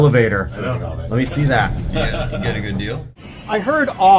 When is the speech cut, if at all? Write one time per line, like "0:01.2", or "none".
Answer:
0:03.2